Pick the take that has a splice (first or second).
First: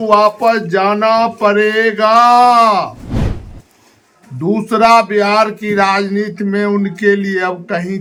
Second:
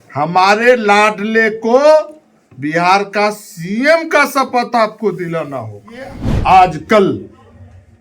second